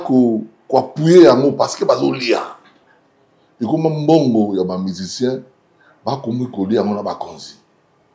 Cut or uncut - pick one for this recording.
uncut